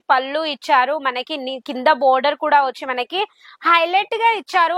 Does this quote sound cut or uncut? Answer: uncut